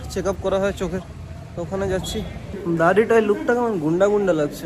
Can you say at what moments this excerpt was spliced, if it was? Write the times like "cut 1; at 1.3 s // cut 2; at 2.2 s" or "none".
cut 1; at 2.5 s